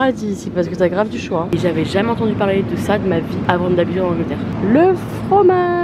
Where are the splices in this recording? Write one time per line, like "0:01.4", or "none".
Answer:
0:01.5
0:03.4
0:04.5